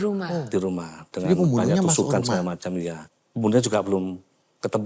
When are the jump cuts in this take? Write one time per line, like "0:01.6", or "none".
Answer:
0:03.0

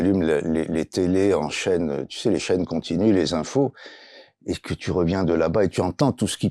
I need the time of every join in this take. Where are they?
none

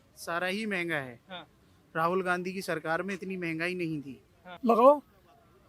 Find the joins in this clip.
0:04.5

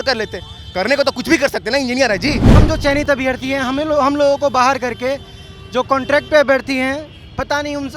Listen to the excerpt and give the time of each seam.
0:02.5

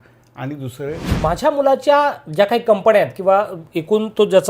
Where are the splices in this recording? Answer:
0:01.0

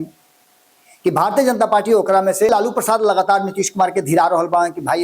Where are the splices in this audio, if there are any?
0:02.5

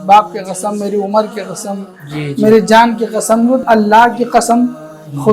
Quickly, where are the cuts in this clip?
0:03.6

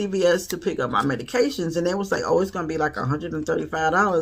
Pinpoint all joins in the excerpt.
none

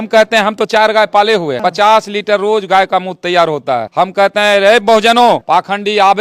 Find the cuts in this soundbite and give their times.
0:01.5
0:03.9
0:05.4

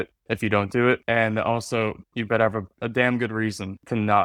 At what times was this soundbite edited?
none

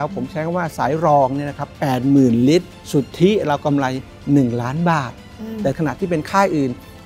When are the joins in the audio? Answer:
0:02.8
0:05.8

